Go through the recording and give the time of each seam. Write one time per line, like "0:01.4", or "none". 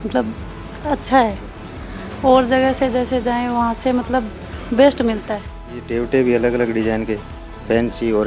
0:05.8